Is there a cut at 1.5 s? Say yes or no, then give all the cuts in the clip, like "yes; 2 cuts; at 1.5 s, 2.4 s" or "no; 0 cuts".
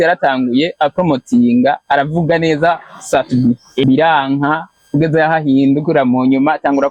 no; 2 cuts; at 3.8 s, 4.7 s